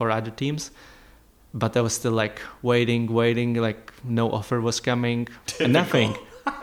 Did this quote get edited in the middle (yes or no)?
yes